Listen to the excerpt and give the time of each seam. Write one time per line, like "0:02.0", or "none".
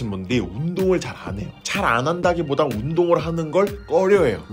none